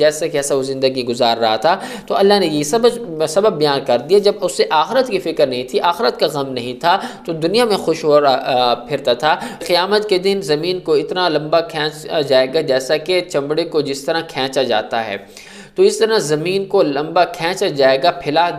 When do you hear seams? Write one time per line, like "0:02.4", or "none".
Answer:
0:09.6